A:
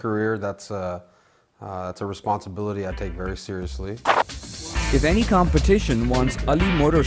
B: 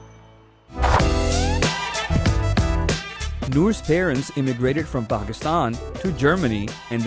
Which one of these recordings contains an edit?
A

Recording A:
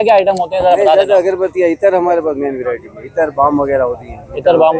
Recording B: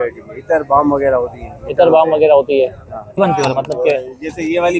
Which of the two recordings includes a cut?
B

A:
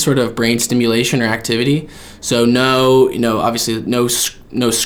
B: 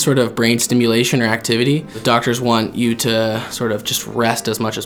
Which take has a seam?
B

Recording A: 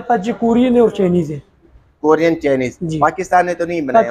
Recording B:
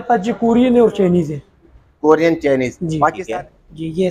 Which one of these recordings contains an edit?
B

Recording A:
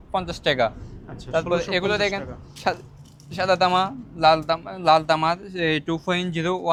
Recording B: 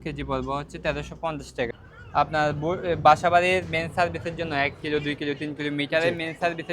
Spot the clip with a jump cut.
B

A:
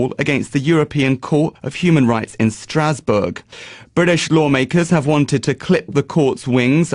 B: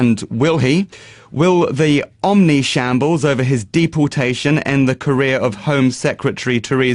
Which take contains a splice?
A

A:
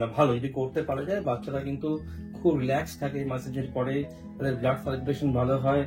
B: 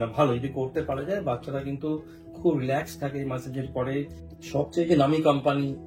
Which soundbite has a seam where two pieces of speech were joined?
B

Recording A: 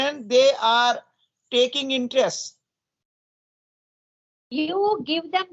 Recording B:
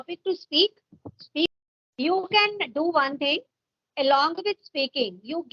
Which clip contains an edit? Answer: B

